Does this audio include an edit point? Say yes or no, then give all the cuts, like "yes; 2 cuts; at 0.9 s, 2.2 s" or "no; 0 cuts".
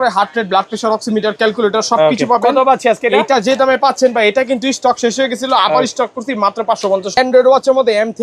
yes; 1 cut; at 7.2 s